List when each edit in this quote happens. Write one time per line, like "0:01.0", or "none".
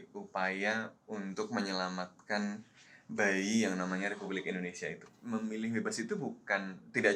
0:05.1